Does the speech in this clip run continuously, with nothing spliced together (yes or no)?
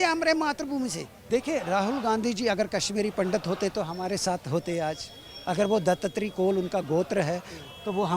no